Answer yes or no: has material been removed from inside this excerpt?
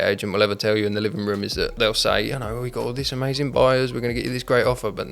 yes